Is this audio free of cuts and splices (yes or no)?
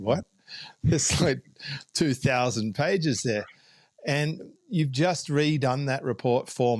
yes